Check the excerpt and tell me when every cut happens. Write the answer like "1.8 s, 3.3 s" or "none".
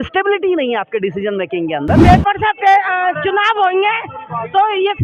2.0 s

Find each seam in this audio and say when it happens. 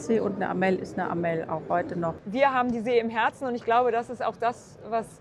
2.2 s

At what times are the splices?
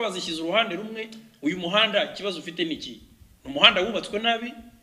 none

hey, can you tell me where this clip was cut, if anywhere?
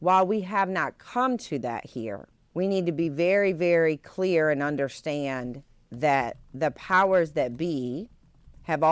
2.3 s

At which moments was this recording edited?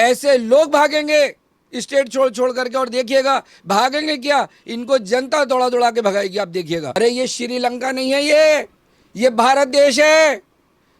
7.0 s

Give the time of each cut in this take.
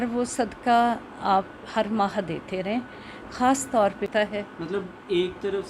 4.1 s

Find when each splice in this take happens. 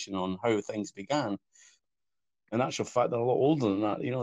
1.9 s

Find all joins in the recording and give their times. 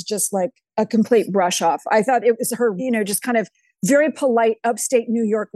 2.8 s

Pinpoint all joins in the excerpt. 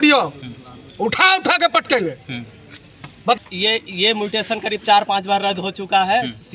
3.4 s

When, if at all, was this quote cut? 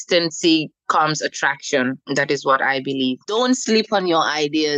3.2 s

